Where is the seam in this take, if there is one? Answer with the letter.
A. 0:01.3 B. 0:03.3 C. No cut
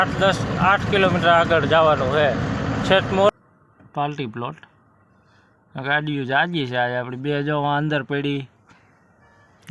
B